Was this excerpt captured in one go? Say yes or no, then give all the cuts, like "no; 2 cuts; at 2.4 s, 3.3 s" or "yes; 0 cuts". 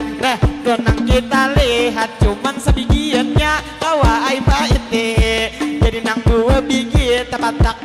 yes; 0 cuts